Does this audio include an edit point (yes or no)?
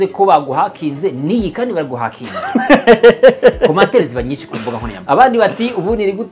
yes